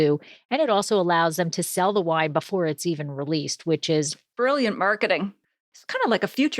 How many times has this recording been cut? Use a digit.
1